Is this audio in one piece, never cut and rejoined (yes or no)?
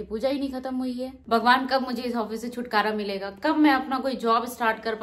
no